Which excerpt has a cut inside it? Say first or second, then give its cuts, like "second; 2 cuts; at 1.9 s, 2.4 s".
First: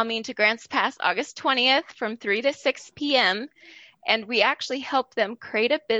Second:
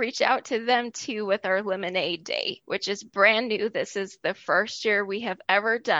second; 1 cut; at 2.6 s